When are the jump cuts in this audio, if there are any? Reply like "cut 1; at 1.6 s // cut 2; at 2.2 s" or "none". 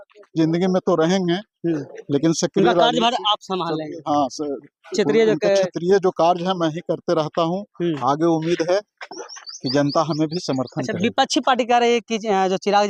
none